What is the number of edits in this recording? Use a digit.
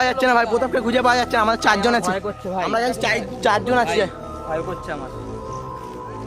0